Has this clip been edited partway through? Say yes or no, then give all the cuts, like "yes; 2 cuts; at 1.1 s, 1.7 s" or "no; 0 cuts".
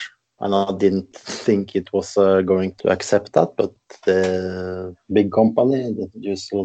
no; 0 cuts